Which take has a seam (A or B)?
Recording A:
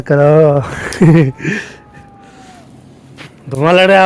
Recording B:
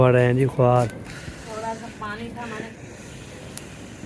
B